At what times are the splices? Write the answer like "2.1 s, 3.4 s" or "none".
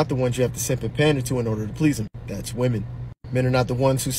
3.2 s